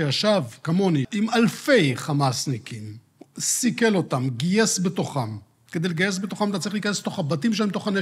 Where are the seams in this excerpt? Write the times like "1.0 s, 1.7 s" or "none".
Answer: 1.1 s